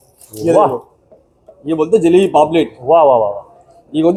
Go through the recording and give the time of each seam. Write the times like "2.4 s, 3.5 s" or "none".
none